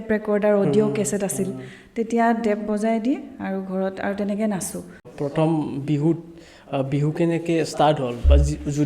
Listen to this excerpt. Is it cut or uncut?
cut